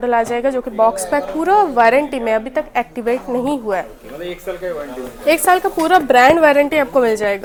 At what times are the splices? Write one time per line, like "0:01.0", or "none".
none